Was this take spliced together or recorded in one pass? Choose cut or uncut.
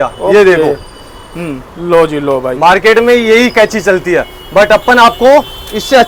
uncut